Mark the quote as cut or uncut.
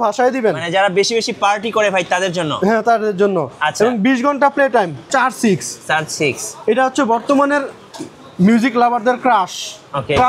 cut